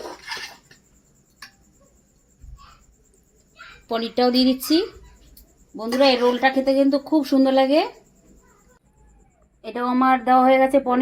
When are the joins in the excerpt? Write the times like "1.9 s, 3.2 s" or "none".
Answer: 8.8 s